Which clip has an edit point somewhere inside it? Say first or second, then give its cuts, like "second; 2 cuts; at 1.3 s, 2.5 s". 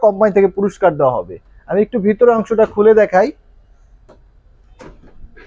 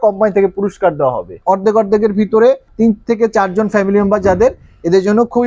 second; 2 cuts; at 1.4 s, 2.7 s